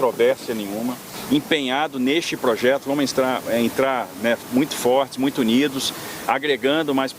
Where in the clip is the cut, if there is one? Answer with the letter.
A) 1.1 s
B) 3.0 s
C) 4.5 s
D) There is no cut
A